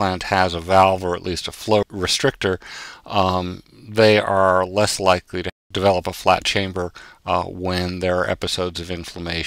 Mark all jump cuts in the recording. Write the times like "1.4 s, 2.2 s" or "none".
1.8 s, 5.4 s